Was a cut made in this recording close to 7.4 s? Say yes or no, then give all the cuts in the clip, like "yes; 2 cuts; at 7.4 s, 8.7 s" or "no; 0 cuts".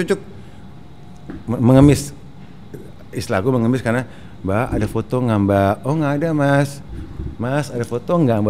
no; 0 cuts